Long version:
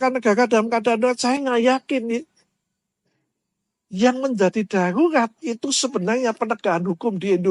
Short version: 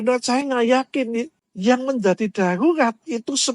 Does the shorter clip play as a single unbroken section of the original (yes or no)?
no